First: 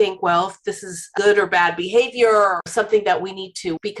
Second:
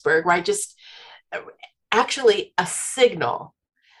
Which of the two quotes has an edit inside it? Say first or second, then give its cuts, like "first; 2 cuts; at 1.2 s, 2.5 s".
first; 2 cuts; at 1.1 s, 2.7 s